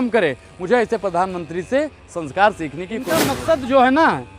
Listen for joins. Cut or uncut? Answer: cut